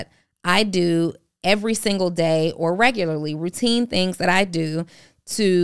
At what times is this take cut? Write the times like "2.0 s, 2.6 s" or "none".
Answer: none